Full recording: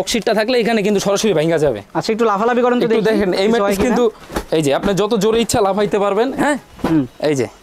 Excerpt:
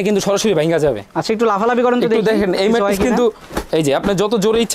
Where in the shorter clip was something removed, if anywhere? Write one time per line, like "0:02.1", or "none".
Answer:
none